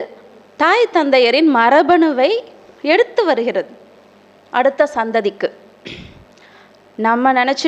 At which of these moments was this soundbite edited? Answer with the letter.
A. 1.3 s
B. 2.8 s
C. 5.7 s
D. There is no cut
D